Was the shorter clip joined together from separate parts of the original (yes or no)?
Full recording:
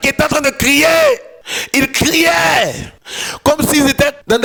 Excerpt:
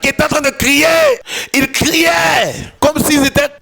yes